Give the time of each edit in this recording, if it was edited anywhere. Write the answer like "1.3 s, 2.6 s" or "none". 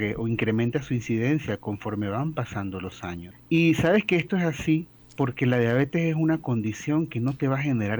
3.3 s, 5.0 s